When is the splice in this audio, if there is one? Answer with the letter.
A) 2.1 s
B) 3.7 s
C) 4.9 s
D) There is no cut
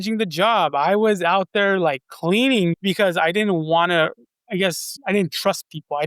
C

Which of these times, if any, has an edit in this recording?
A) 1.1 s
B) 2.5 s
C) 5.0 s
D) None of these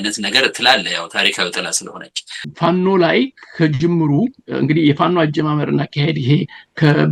B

